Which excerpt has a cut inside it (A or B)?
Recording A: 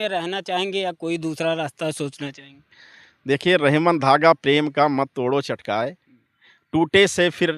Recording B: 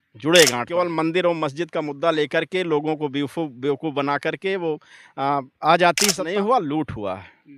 B